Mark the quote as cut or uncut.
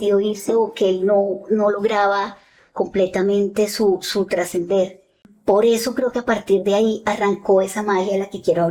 cut